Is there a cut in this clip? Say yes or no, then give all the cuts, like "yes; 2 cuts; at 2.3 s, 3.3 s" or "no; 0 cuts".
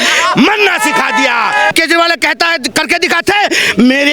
yes; 1 cut; at 1.7 s